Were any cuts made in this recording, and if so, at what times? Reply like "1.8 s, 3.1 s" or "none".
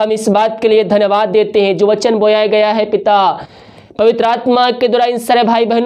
none